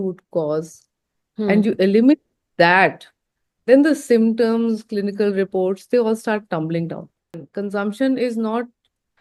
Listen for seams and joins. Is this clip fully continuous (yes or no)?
no